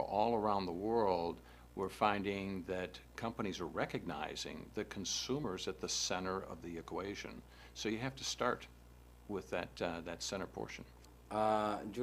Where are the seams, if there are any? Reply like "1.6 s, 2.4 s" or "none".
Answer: none